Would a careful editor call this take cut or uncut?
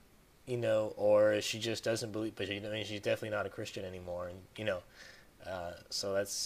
uncut